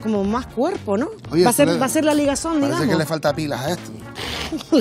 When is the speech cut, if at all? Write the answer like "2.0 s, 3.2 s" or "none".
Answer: 1.2 s